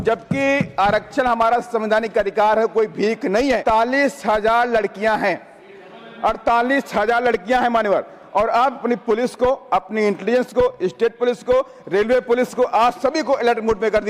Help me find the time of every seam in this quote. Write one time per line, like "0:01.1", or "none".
0:03.6
0:08.8